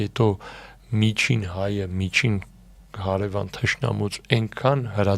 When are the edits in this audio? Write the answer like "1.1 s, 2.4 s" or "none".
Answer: none